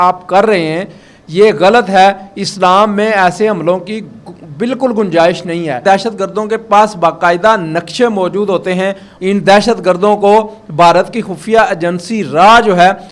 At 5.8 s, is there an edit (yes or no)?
yes